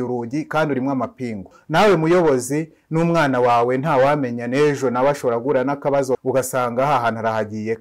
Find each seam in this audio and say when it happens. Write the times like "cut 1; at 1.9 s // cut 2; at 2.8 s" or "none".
cut 1; at 1.6 s // cut 2; at 6.2 s